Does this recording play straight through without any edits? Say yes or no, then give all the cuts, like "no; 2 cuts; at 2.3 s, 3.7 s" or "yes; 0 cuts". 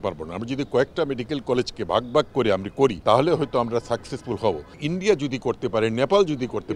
no; 1 cut; at 3.0 s